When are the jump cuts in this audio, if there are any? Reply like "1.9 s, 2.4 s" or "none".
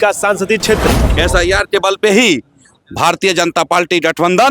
1.0 s